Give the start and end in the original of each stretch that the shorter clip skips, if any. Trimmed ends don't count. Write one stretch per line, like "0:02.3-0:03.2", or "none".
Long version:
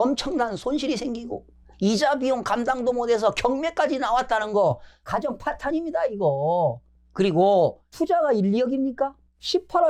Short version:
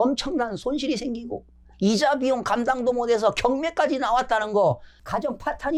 none